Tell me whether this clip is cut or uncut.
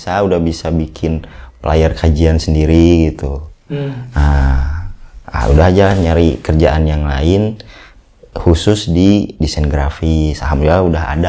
uncut